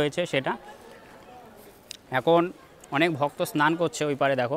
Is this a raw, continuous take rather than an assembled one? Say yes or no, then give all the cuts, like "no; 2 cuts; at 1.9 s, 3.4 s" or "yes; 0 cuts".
yes; 0 cuts